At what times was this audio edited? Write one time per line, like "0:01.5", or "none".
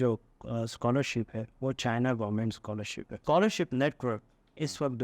0:03.2